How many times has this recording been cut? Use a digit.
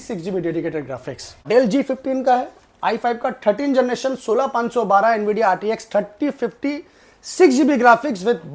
1